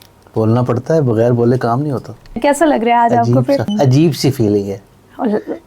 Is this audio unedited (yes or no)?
no